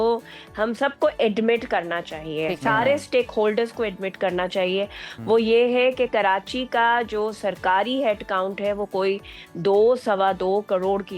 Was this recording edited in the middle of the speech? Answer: no; 0 cuts

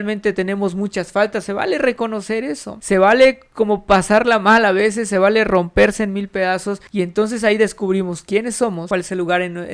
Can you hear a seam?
yes; 3 cuts; at 2.7 s, 6.8 s, 8.8 s

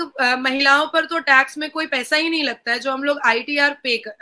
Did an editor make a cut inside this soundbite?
no; 0 cuts

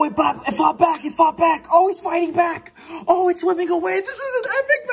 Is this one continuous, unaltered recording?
yes; 0 cuts

